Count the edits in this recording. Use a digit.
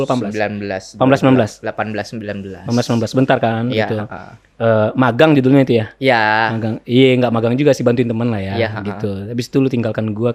0